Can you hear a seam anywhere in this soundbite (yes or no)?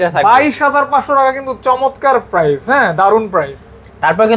no